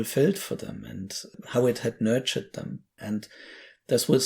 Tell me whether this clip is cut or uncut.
cut